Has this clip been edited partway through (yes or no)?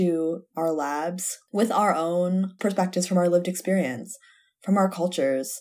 yes